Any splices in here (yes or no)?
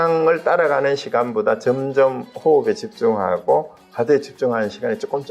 no